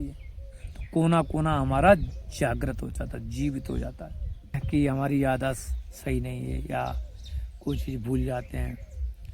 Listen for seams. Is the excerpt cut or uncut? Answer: cut